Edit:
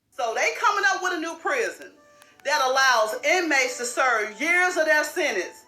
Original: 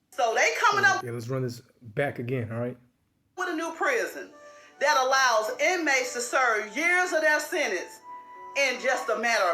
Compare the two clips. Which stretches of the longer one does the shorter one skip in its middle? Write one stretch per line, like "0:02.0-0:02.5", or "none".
0:01.0-0:03.4